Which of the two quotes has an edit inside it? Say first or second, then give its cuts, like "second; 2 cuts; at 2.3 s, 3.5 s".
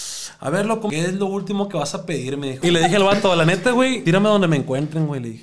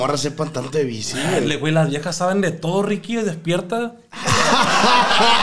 first; 3 cuts; at 0.9 s, 2.5 s, 4.0 s